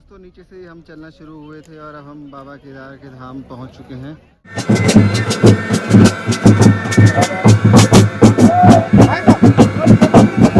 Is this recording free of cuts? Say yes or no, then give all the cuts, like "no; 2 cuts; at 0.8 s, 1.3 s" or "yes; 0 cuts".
no; 1 cut; at 4.6 s